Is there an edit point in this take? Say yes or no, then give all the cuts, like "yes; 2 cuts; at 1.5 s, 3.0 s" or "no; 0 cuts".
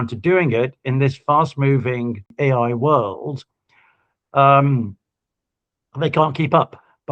yes; 1 cut; at 2.3 s